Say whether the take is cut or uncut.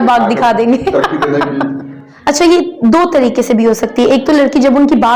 cut